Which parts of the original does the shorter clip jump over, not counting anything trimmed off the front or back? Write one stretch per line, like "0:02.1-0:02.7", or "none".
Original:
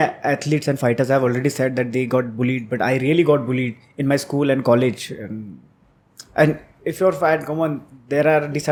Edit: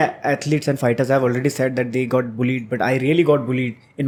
none